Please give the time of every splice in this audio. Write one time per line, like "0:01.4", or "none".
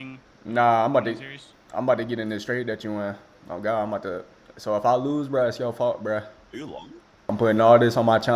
0:07.3

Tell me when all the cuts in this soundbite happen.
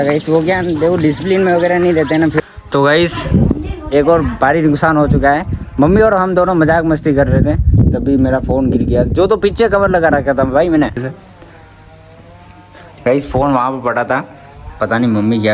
0:02.4
0:11.0

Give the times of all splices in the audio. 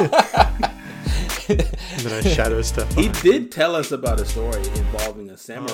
none

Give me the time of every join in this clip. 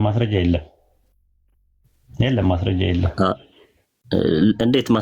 none

